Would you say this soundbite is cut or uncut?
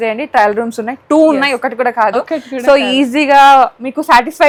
uncut